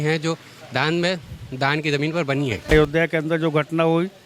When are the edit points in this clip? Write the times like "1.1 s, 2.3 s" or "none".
2.7 s